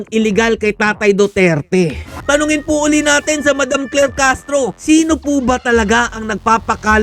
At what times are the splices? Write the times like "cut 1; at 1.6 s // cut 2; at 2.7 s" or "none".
cut 1; at 2.1 s // cut 2; at 4.8 s